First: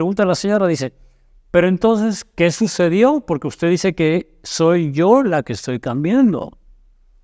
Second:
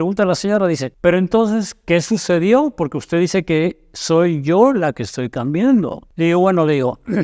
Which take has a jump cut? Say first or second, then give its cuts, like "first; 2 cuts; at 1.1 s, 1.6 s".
second; 2 cuts; at 0.9 s, 6.0 s